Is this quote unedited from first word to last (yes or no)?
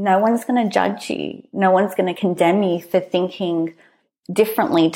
no